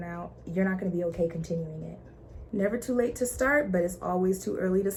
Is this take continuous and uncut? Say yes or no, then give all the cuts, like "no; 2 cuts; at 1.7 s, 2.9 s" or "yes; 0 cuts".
yes; 0 cuts